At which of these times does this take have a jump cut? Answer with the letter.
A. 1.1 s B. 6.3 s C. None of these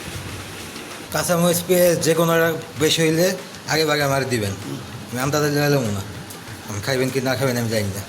A